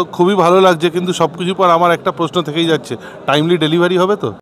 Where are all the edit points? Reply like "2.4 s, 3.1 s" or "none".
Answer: none